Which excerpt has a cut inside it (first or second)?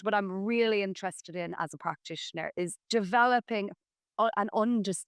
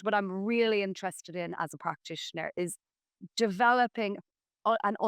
first